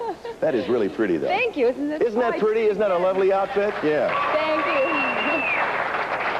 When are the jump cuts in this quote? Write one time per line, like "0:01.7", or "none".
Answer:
none